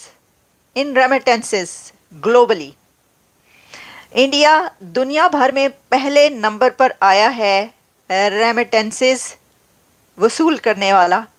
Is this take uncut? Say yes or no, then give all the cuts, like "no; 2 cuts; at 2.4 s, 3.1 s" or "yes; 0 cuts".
yes; 0 cuts